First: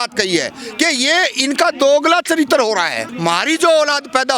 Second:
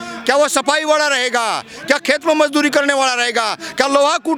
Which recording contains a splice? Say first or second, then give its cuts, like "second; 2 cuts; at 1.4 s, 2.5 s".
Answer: first; 1 cut; at 3.1 s